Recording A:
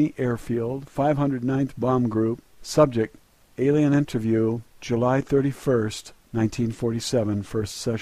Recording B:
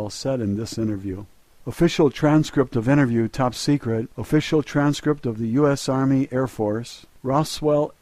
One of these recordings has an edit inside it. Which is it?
A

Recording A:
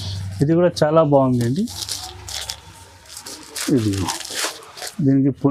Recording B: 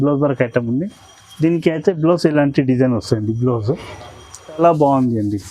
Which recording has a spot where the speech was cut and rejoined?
B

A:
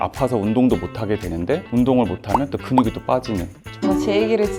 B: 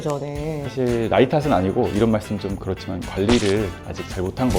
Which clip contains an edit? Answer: A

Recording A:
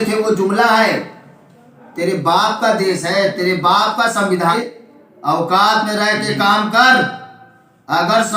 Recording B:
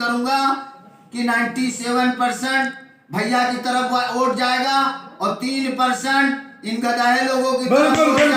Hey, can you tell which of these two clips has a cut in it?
A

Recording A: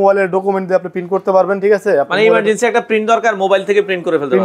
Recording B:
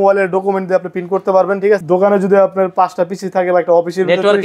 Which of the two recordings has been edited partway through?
B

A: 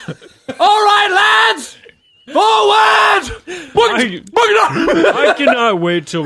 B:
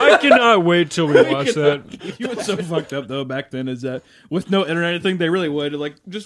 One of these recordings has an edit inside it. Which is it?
B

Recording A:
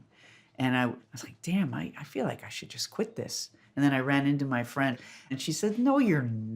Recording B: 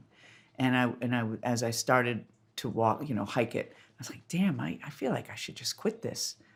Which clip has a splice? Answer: A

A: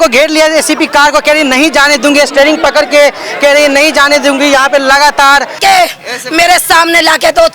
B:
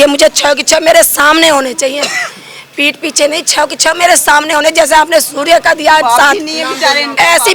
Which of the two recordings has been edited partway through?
A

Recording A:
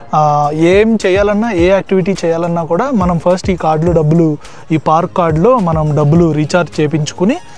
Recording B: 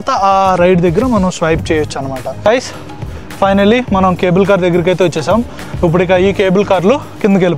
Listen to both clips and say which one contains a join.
B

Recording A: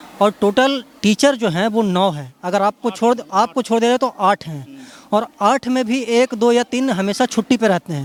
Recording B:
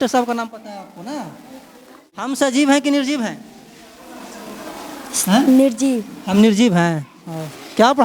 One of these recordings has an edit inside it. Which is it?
B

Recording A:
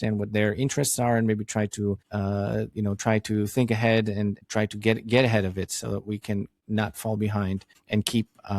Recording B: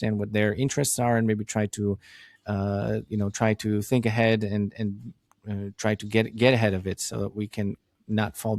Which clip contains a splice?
A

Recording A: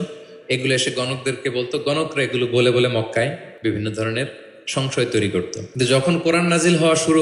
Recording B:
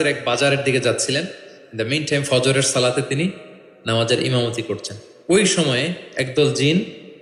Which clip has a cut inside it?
A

